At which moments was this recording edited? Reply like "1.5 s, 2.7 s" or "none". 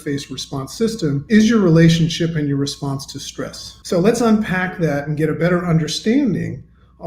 1.2 s, 3.7 s